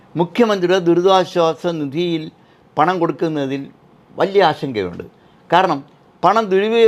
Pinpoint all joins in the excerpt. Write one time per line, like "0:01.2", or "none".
none